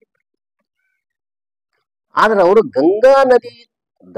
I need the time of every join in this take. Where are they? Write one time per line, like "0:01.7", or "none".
none